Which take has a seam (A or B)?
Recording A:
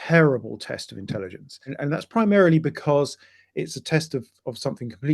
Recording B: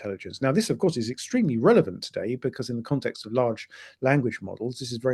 A